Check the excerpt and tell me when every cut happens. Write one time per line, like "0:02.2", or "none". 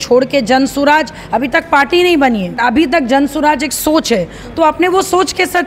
0:02.6